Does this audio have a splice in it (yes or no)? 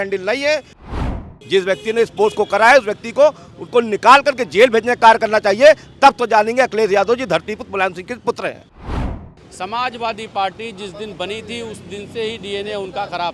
yes